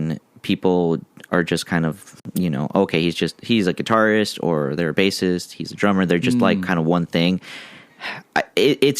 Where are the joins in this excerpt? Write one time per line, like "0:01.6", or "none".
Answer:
0:02.1